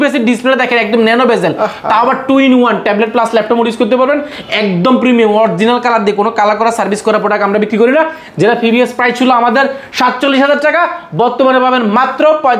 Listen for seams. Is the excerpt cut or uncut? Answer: uncut